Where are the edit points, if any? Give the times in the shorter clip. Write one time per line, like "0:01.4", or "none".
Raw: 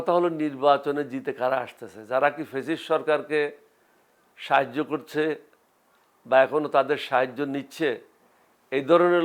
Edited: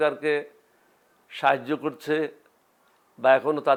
none